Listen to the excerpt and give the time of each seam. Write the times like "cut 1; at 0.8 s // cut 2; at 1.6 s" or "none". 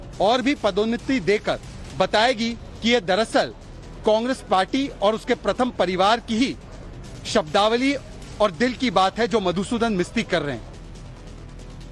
none